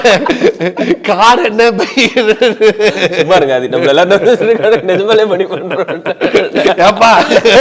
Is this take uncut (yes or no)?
yes